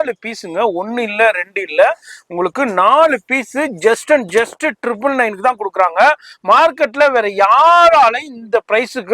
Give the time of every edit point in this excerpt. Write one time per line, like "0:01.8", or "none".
none